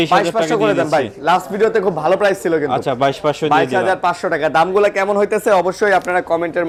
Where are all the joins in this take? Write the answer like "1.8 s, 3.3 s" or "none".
none

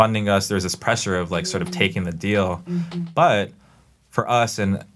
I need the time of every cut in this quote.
none

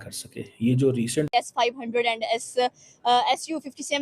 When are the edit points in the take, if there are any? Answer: 1.3 s

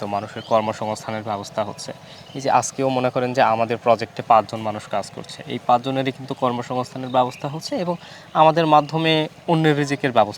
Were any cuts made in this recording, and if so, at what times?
9.4 s

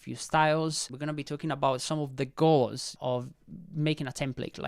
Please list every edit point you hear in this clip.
0.9 s, 3.0 s

